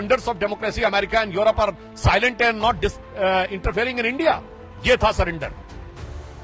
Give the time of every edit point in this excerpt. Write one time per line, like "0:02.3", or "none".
0:05.5